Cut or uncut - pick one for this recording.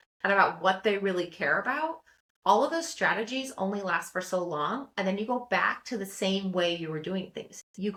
uncut